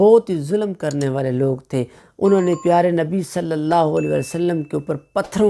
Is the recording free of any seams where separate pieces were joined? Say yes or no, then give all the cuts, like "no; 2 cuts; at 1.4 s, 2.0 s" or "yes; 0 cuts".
no; 1 cut; at 2.0 s